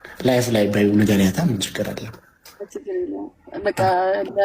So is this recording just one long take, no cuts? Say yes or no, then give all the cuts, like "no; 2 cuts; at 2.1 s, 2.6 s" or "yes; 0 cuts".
no; 1 cut; at 2.8 s